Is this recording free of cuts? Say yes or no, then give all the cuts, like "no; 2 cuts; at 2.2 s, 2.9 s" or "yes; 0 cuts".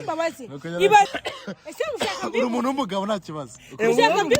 no; 1 cut; at 1.1 s